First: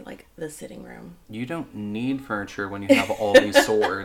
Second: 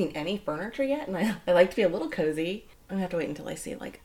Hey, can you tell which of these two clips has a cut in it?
second; 1 cut; at 2.7 s

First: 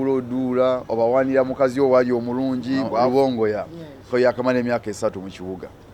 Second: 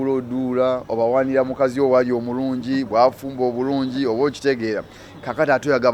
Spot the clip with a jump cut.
first; 1 cut; at 3.1 s

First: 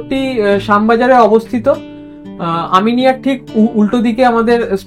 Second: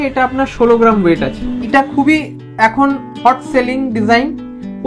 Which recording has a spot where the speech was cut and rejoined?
second; 1 cut; at 1.7 s

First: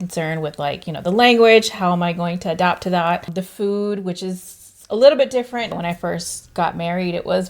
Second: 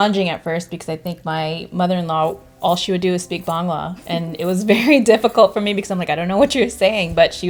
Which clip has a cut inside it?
first; 1 cut; at 5.7 s

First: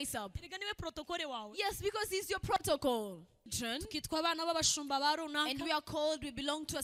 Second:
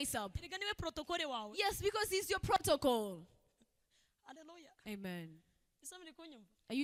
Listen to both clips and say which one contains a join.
first; 1 cut; at 3.5 s

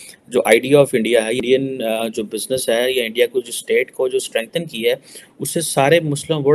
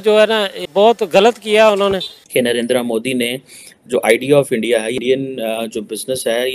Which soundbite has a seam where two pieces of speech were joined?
second; 1 cut; at 2.1 s

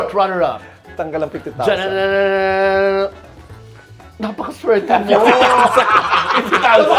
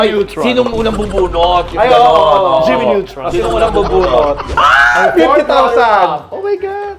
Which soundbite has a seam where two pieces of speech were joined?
second; 1 cut; at 4.5 s

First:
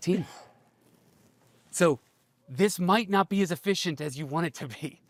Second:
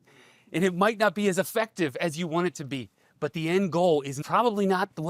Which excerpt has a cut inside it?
second; 1 cut; at 4.1 s

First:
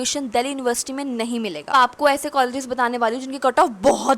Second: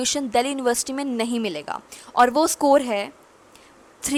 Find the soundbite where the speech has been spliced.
first; 1 cut; at 1.7 s

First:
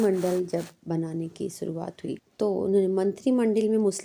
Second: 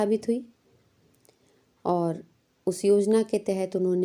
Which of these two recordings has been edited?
first; 1 cut; at 2.3 s

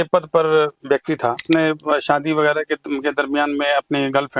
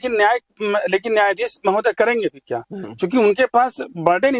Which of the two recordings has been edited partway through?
first; 1 cut; at 1.4 s

